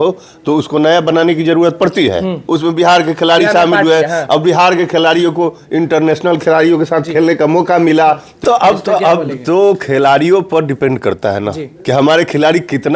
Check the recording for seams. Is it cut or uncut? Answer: cut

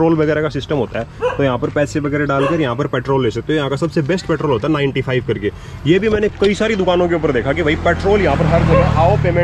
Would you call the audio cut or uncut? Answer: uncut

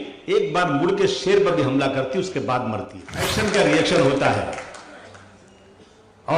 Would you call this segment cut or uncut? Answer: cut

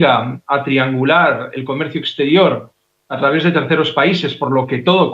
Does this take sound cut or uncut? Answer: cut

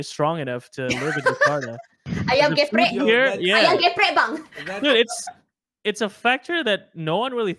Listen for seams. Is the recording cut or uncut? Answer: uncut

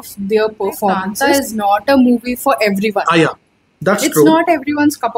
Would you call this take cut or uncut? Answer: cut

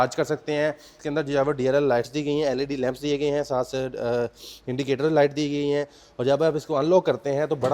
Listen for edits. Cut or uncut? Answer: cut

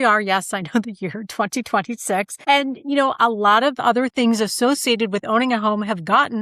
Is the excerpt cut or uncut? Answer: cut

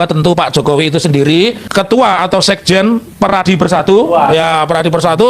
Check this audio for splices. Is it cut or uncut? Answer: cut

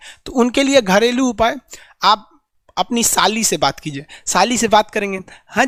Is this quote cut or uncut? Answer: uncut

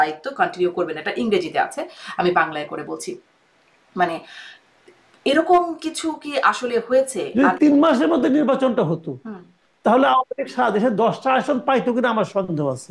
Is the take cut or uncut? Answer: cut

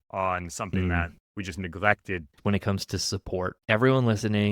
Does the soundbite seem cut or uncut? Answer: cut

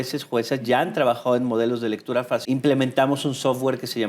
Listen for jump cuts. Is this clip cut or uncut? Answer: cut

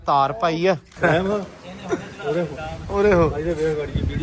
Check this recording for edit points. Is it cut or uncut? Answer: cut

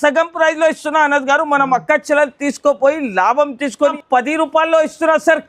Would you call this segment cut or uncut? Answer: cut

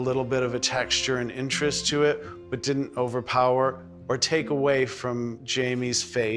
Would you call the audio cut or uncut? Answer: cut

